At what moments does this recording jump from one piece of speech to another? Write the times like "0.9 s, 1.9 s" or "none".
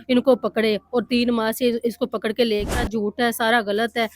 2.7 s